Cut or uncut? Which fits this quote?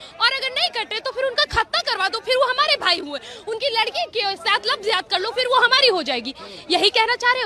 uncut